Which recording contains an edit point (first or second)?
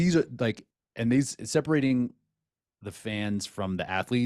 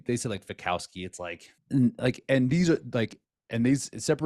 second